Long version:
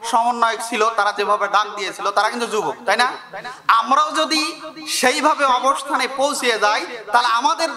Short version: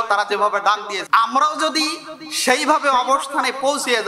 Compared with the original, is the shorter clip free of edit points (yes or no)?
no